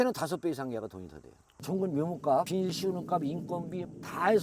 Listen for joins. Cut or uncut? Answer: cut